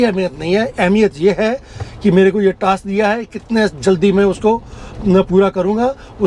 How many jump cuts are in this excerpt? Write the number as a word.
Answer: zero